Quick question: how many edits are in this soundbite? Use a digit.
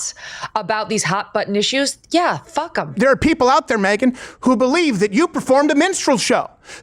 1